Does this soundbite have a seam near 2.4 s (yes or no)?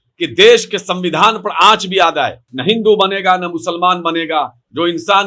yes